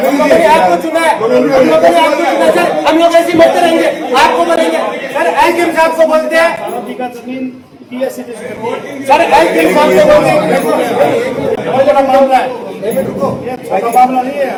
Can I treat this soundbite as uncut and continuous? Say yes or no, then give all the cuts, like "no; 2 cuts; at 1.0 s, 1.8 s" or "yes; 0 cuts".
yes; 0 cuts